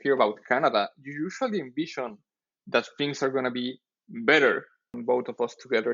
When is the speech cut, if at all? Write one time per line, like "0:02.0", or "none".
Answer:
0:04.9